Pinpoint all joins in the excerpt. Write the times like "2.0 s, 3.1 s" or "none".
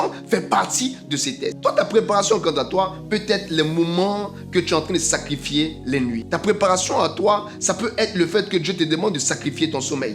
1.6 s, 6.2 s